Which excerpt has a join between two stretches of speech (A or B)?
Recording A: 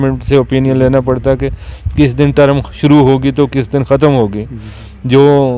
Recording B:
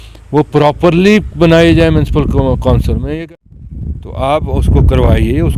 B